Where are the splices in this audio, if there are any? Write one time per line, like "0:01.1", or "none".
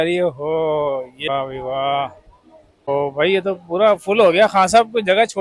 0:01.3
0:02.9

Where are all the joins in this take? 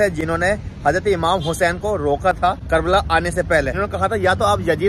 0:02.6
0:03.7

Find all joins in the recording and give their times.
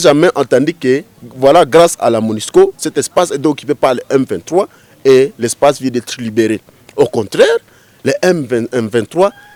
none

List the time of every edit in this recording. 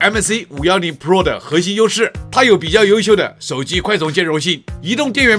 0:02.2

